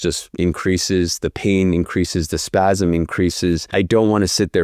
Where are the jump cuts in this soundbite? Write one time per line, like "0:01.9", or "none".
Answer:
0:03.6